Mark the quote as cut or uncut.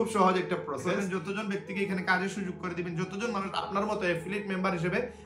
cut